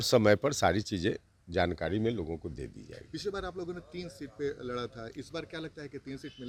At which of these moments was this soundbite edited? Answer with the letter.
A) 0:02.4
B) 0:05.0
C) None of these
C